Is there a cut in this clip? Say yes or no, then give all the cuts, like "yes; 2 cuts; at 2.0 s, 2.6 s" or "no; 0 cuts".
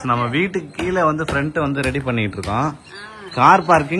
no; 0 cuts